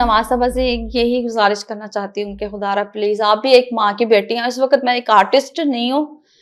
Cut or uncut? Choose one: uncut